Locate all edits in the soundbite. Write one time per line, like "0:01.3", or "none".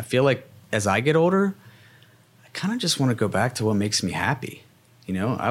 none